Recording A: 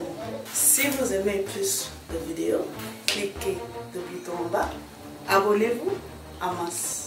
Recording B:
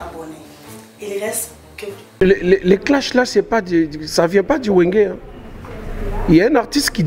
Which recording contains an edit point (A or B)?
B